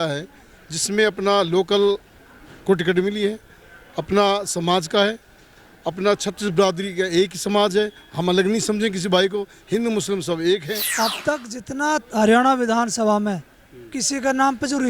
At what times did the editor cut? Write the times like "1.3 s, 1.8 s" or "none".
10.8 s